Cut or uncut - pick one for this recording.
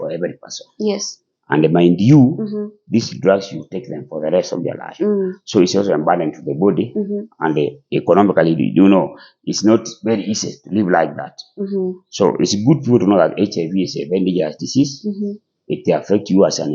uncut